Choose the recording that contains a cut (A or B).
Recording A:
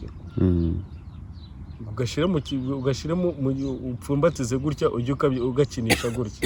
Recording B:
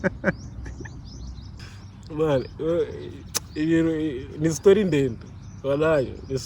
B